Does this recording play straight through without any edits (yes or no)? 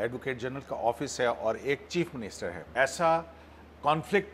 no